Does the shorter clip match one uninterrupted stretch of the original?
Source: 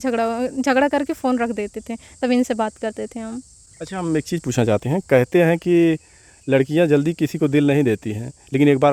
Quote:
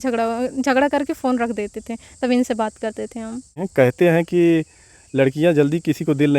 no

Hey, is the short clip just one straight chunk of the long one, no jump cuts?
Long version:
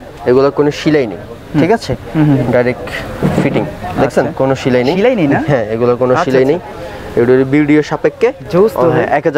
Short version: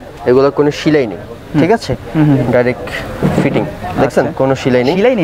yes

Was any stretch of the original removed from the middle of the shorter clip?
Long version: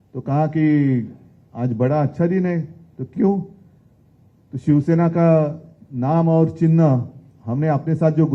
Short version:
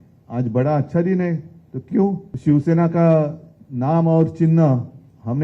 yes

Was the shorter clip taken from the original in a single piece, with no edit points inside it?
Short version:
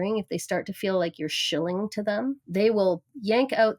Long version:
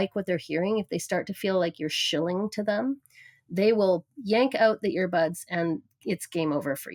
no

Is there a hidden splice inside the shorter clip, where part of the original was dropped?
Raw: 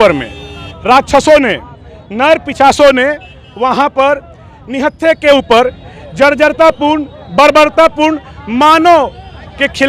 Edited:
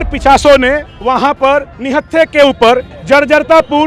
yes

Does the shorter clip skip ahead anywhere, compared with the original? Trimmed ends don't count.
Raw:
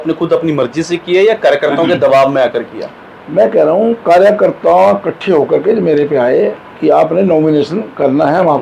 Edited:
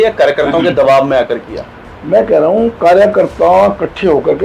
no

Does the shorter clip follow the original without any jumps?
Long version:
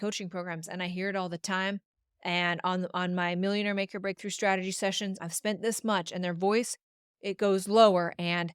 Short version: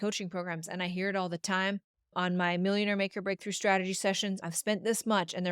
no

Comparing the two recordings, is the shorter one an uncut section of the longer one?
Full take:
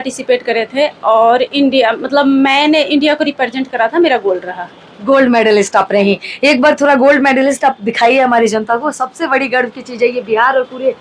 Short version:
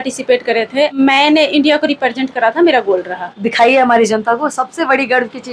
no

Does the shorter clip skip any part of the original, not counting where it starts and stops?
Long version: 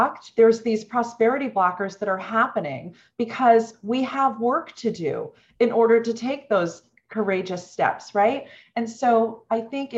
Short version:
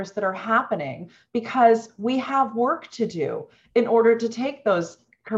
no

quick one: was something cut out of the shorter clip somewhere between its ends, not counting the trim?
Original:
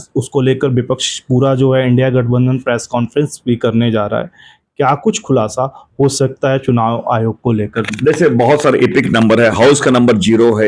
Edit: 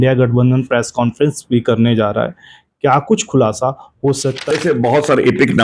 yes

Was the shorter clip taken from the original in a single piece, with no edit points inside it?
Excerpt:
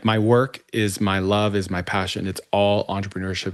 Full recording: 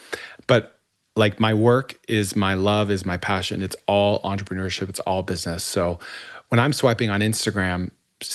yes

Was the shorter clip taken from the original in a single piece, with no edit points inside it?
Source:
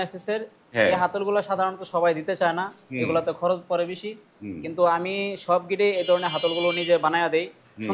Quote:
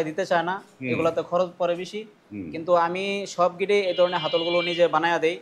yes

